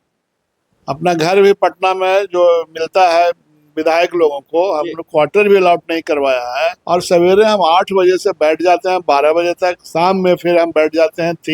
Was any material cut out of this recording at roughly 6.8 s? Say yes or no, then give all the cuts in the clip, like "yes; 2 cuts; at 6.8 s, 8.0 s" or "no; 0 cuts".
yes; 1 cut; at 6.8 s